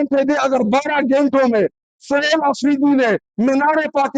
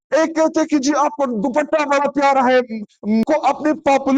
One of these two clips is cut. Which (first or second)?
second